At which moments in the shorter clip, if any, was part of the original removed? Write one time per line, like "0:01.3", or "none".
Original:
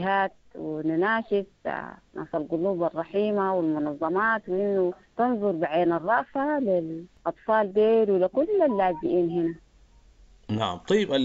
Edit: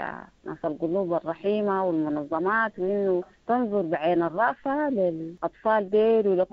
0:05.3